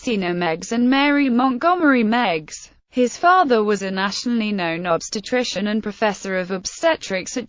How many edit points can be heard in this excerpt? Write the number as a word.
one